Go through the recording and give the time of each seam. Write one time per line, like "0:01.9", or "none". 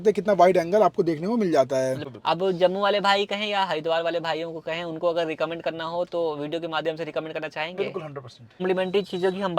0:02.1
0:08.6